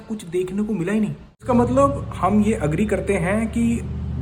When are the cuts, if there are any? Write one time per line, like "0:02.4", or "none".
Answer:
none